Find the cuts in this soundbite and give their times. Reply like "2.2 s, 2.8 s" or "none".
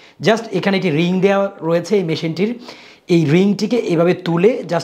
none